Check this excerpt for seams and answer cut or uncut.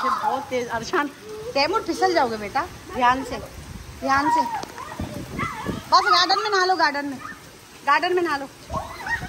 uncut